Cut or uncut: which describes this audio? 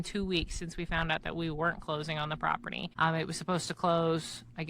cut